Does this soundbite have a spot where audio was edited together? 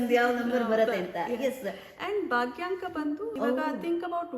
yes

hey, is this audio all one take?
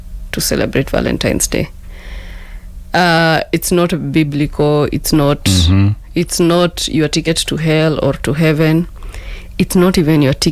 yes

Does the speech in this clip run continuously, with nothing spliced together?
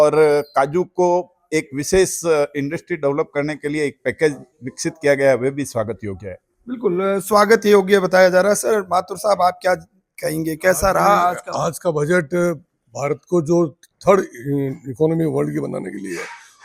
yes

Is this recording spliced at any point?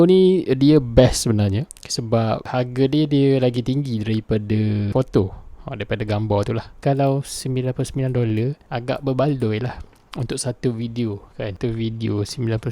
yes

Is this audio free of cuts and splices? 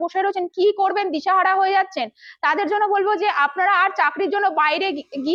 yes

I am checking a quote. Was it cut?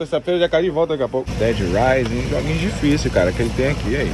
yes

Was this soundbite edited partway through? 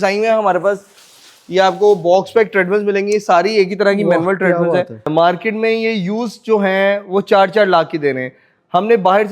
no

